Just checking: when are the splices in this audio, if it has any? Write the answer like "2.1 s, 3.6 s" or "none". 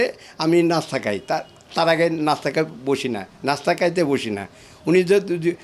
none